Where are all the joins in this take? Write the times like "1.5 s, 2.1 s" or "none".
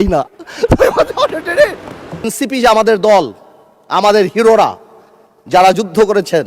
2.3 s